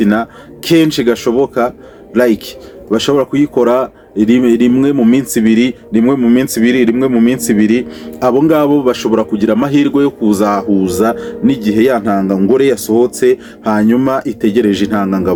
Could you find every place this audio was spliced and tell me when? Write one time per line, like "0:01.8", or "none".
none